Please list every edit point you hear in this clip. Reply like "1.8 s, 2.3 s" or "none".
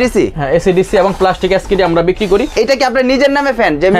none